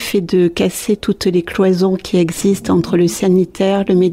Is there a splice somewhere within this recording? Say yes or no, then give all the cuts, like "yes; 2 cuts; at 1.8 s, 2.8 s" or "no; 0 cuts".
no; 0 cuts